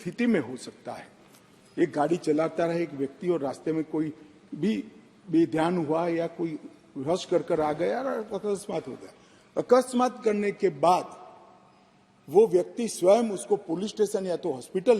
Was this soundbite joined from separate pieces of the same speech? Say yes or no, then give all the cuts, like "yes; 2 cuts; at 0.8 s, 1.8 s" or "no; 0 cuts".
no; 0 cuts